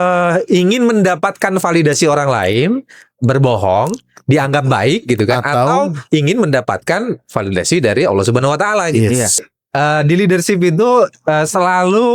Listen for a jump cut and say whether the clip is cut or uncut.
cut